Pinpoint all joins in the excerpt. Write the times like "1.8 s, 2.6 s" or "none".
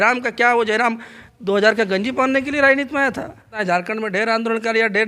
3.6 s